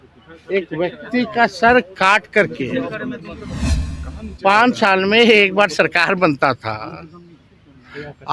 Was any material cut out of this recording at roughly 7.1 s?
no; 1 cut; at 3.7 s

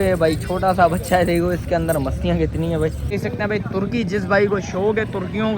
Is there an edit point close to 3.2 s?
yes; 1 cut; at 3.2 s

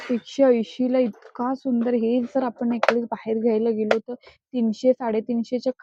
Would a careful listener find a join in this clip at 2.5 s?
no; 0 cuts

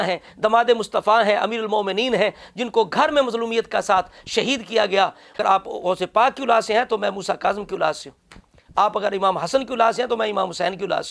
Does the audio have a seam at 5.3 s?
yes; 1 cut; at 5.3 s

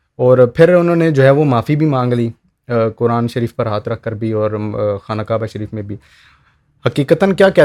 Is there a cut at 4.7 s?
no; 0 cuts

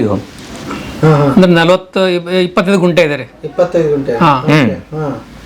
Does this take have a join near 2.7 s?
no; 0 cuts

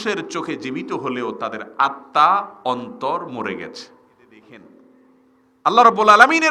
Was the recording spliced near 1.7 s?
no; 1 cut; at 4.4 s

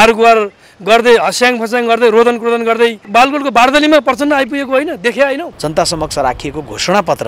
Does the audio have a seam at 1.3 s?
no; 2 cuts; at 3.1 s, 5.5 s

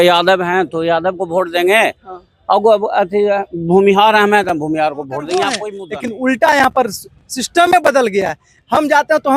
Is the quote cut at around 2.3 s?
no; 1 cut; at 5.7 s

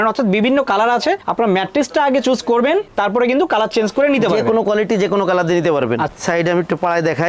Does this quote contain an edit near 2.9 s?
yes; 2 cuts; at 2.9 s, 6.1 s

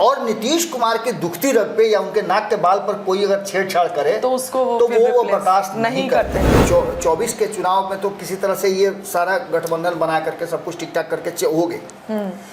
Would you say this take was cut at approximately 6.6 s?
yes; 1 cut; at 6.6 s

